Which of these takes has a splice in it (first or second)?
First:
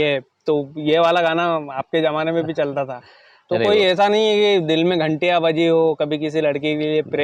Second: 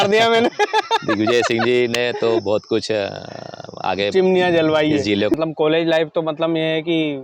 second